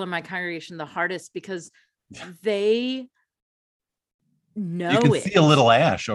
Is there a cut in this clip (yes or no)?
yes